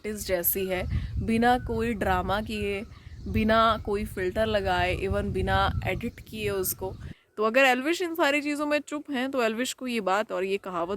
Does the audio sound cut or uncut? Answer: cut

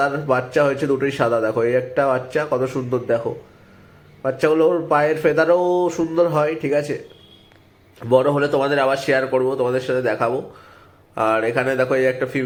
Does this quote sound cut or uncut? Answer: uncut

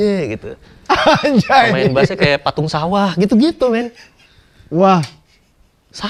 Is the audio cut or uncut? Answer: uncut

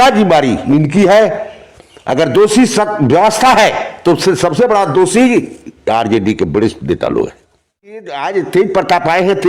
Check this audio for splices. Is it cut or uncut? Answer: cut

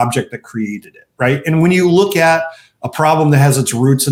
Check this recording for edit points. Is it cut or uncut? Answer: uncut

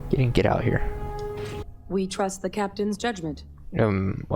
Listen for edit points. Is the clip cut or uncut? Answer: cut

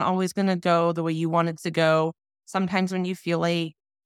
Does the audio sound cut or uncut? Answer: uncut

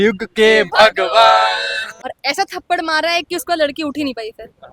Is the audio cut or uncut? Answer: cut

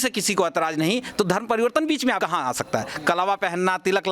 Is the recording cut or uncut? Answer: cut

